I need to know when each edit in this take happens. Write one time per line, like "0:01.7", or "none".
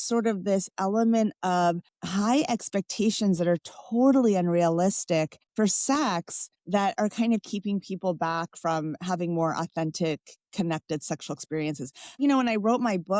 none